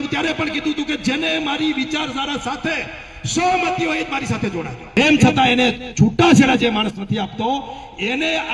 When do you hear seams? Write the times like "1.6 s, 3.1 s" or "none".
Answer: 4.8 s